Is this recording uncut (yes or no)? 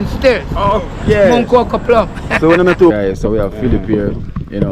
no